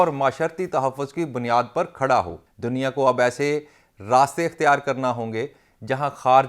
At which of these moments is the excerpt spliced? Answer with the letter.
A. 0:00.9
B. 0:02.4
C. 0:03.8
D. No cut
B